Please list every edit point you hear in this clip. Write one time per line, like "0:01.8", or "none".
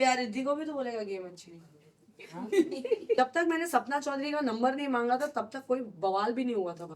0:03.2